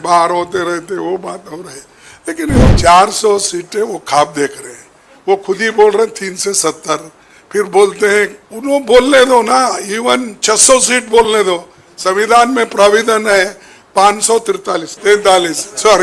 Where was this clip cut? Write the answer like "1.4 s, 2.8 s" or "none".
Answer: 2.7 s, 8.5 s, 14.9 s